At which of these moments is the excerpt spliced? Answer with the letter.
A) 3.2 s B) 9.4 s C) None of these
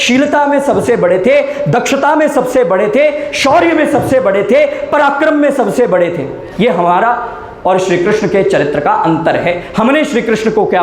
C